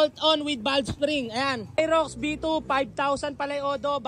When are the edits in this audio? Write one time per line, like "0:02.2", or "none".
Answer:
0:01.8